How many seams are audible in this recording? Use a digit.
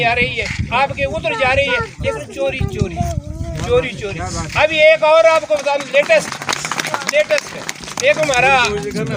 0